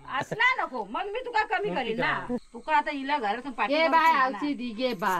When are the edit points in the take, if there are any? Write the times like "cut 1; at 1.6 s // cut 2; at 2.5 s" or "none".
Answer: cut 1; at 2.4 s